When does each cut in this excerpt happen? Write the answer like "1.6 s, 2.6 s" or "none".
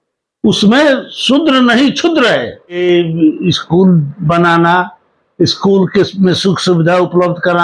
2.8 s